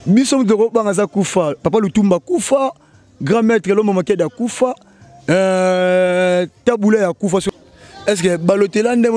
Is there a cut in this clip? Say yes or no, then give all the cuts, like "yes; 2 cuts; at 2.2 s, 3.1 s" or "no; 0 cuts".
yes; 1 cut; at 7.5 s